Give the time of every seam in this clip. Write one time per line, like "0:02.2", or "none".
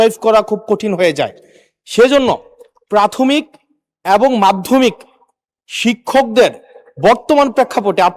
none